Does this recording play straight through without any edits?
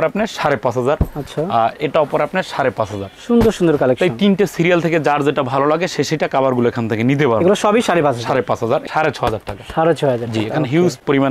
no; 1 cut; at 8.8 s

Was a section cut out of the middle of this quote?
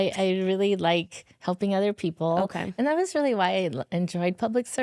no; 0 cuts

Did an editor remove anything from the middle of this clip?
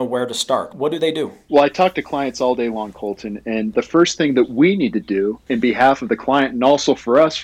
yes; 1 cut; at 1.4 s

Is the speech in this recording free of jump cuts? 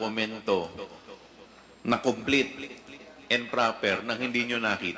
yes; 0 cuts

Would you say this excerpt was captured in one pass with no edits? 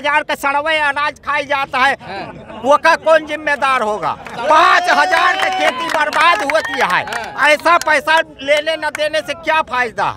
yes; 0 cuts

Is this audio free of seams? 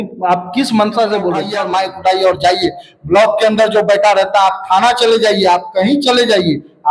no; 1 cut; at 1.5 s

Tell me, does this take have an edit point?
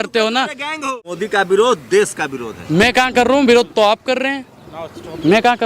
yes; 1 cut; at 1.2 s

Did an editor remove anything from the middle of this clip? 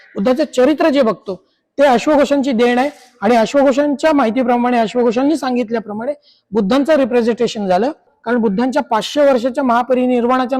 yes; 1 cut; at 8.1 s

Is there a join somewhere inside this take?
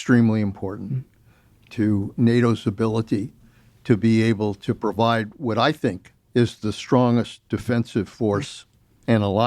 yes; 1 cut; at 6.1 s

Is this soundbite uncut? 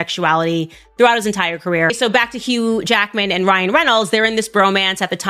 no; 1 cut; at 2.0 s

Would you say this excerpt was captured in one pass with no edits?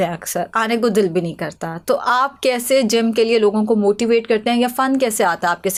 yes; 0 cuts

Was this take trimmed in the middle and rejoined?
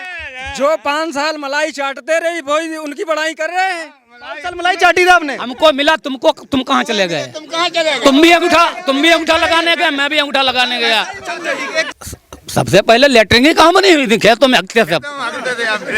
yes; 1 cut; at 11.9 s

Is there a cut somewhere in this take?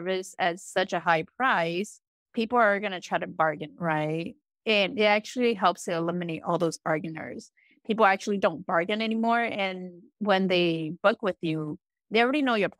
no; 0 cuts

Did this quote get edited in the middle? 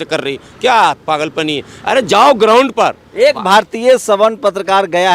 no; 0 cuts

